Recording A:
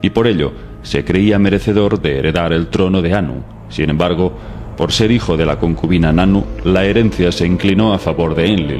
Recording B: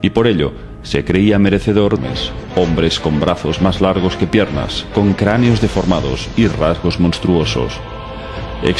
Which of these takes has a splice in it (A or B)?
A